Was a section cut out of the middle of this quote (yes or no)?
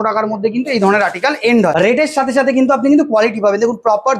yes